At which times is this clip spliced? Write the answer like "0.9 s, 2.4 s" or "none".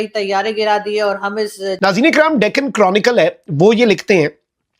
1.7 s

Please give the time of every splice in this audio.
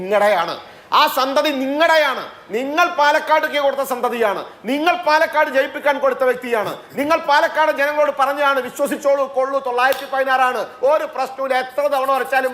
none

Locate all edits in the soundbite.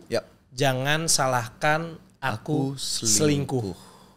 none

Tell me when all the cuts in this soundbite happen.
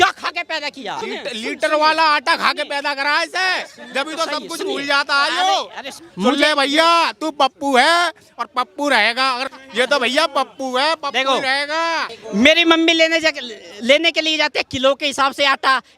1.0 s, 6.0 s, 9.5 s, 12.1 s

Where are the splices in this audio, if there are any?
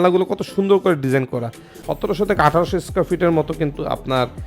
1.8 s

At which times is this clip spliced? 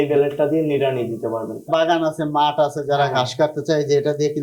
1.7 s

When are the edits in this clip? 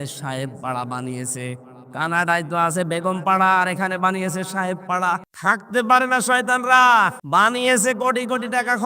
5.3 s, 7.2 s

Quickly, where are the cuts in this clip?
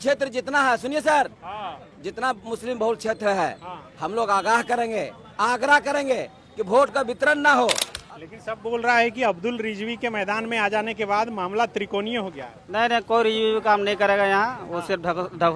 7.9 s

